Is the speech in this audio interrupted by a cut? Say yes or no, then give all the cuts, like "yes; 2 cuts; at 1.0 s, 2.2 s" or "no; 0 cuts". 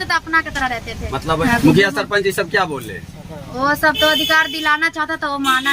yes; 1 cut; at 1.4 s